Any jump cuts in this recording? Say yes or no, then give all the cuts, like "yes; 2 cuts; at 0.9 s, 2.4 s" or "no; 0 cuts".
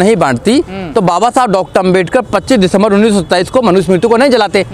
no; 0 cuts